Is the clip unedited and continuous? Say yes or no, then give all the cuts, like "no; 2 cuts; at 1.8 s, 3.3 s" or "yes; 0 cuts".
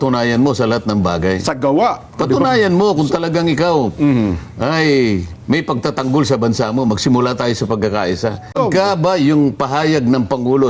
no; 1 cut; at 8.5 s